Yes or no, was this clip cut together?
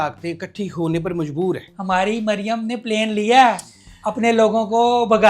yes